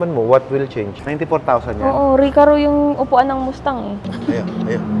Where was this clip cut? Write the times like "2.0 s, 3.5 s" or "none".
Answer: 0.9 s, 4.0 s